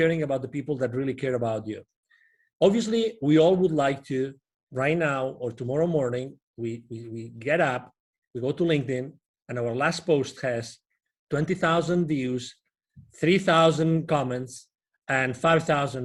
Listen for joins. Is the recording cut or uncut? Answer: uncut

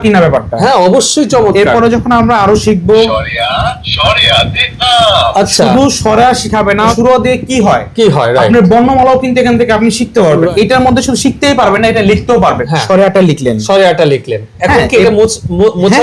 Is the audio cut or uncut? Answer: cut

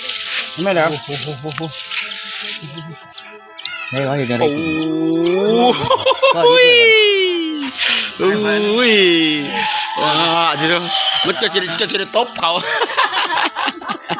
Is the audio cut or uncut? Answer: uncut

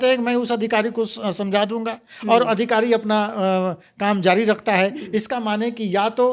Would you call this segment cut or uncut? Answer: uncut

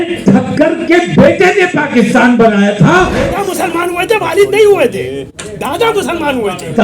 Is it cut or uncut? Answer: cut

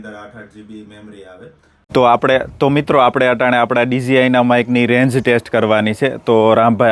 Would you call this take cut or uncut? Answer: cut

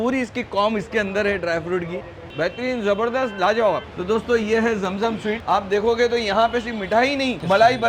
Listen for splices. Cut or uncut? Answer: uncut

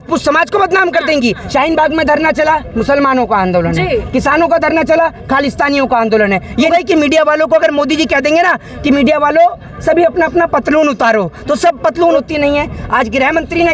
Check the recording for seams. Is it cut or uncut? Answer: cut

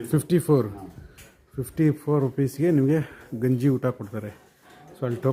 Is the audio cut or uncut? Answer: uncut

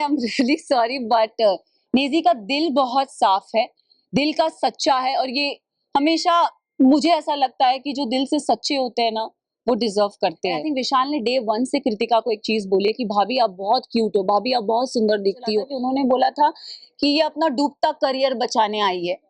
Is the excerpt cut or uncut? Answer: cut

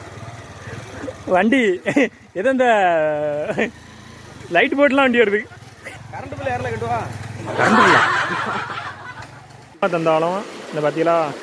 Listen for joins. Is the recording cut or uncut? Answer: cut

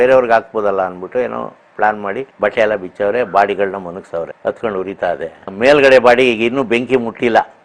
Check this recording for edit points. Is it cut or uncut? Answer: uncut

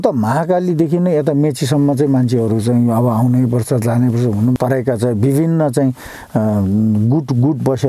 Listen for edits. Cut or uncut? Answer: cut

